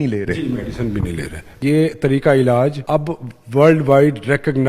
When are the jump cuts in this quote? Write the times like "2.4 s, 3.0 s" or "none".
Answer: 1.6 s, 2.8 s